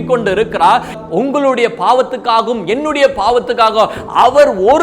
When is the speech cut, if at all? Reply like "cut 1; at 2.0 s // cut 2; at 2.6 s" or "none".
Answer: none